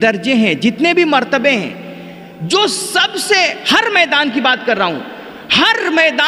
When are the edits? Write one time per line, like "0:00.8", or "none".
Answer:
none

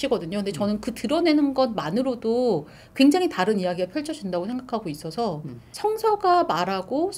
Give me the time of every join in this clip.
0:05.6

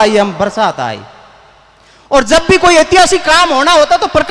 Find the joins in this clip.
none

